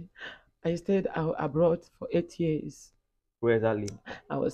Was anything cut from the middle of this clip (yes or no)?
no